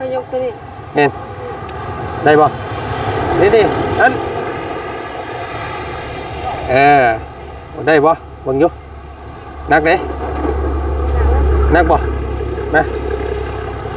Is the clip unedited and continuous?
yes; 0 cuts

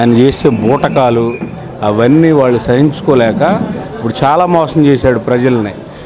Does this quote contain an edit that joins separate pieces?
no; 0 cuts

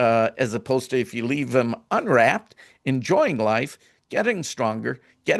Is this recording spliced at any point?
no; 0 cuts

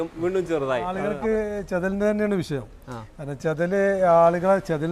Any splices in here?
yes; 1 cut; at 1.0 s

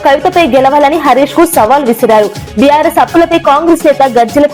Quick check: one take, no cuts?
yes; 0 cuts

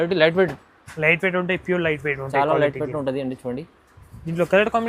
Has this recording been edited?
no; 0 cuts

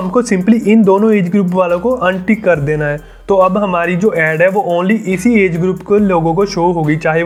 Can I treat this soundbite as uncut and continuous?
yes; 0 cuts

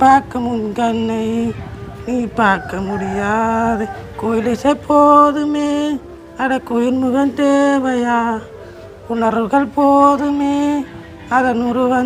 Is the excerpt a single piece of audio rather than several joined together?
yes; 0 cuts

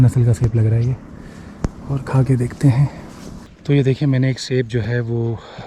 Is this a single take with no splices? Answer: yes; 0 cuts

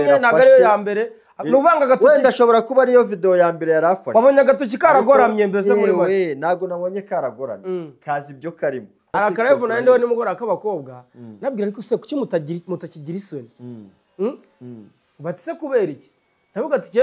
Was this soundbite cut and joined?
yes; 1 cut; at 9.0 s

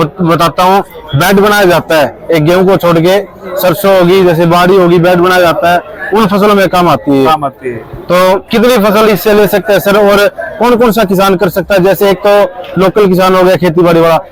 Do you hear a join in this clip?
no; 0 cuts

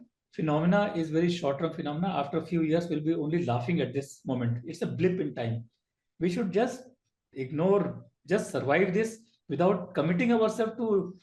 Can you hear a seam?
no; 0 cuts

